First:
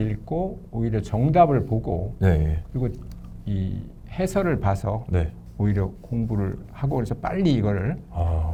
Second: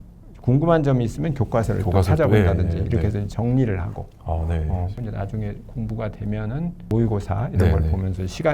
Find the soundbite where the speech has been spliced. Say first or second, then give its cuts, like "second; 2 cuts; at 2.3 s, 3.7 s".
second; 2 cuts; at 4.9 s, 6.9 s